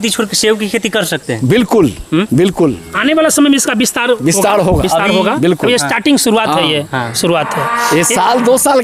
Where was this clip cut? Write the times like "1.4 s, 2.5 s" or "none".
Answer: none